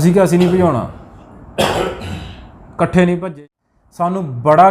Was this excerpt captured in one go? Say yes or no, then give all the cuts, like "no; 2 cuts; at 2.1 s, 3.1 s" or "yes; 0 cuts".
no; 1 cut; at 3.3 s